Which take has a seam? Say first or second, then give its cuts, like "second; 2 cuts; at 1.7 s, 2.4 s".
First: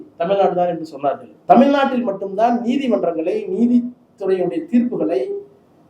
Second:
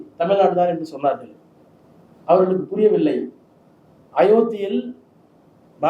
first; 1 cut; at 1.3 s